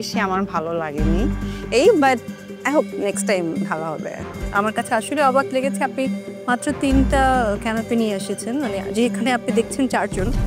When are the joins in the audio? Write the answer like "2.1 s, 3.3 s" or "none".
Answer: 4.3 s